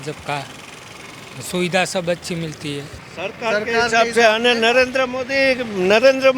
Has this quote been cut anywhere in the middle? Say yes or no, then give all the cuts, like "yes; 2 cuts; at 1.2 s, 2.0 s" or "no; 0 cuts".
yes; 1 cut; at 3.0 s